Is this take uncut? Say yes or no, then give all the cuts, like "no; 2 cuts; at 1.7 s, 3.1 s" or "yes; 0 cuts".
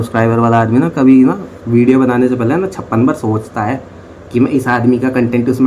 yes; 0 cuts